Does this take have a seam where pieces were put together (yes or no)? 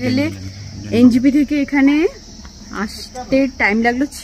no